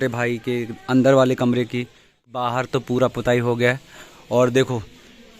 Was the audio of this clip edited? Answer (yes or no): yes